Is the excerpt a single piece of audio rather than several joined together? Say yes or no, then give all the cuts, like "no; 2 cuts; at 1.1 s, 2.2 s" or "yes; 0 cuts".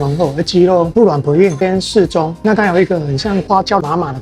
yes; 0 cuts